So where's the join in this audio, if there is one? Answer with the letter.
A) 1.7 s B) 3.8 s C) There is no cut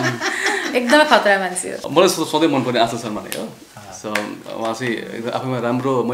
A